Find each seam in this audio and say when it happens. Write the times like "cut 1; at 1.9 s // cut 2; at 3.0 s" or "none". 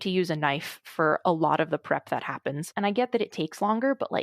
cut 1; at 2.7 s